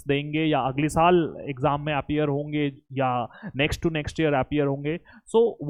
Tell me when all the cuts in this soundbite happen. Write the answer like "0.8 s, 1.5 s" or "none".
none